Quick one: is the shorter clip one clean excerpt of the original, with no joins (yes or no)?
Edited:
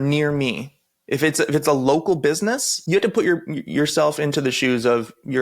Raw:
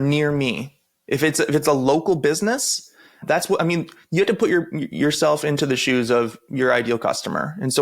no